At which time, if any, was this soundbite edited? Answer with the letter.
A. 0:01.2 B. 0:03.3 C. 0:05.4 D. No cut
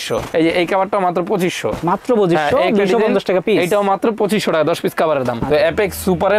C